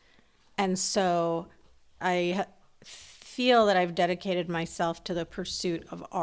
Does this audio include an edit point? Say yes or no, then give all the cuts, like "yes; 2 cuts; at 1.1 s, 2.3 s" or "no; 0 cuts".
yes; 1 cut; at 2.0 s